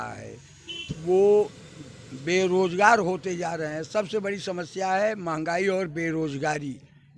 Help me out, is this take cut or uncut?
uncut